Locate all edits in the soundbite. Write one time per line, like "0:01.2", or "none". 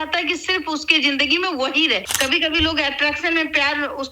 0:02.1